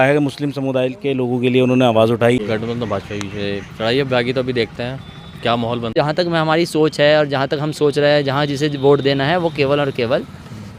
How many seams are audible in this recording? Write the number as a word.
two